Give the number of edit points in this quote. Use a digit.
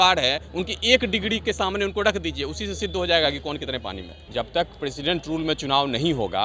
1